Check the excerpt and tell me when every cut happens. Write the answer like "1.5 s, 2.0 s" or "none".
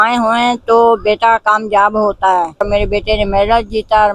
2.7 s